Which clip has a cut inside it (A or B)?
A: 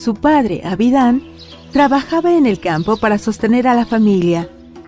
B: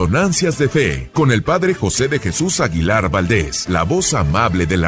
B